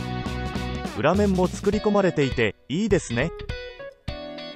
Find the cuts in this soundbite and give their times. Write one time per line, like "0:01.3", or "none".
0:01.0
0:03.3